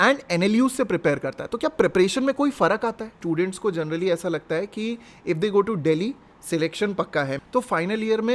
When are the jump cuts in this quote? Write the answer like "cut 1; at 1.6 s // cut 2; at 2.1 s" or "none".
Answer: cut 1; at 3.1 s // cut 2; at 7.4 s